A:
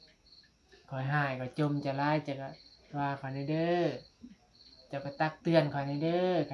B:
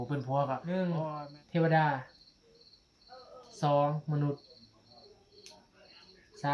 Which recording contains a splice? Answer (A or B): B